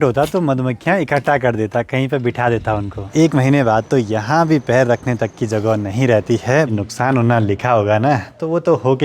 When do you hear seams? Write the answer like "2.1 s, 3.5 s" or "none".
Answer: 3.1 s, 6.7 s